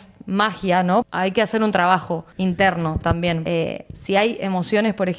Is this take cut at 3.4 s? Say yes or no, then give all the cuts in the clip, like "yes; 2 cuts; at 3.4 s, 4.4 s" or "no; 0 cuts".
yes; 3 cuts; at 1.0 s, 2.2 s, 3.4 s